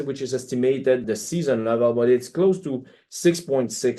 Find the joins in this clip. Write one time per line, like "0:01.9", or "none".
none